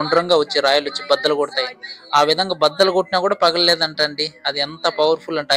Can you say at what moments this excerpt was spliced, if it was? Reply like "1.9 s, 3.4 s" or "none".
none